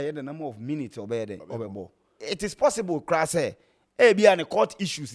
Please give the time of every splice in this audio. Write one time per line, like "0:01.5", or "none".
0:02.2